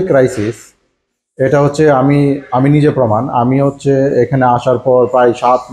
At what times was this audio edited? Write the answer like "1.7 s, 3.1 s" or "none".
none